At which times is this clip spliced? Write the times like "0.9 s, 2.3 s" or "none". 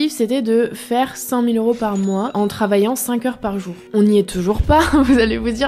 none